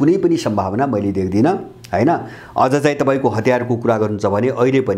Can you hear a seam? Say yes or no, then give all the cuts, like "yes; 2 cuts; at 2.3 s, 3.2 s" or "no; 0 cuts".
no; 0 cuts